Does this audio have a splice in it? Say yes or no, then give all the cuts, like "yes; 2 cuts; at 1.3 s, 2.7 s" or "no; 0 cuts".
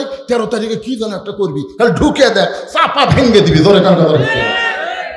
no; 0 cuts